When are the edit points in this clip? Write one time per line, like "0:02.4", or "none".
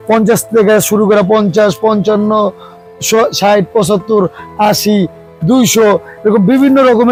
none